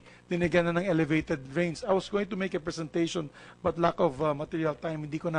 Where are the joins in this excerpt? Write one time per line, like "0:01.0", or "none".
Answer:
none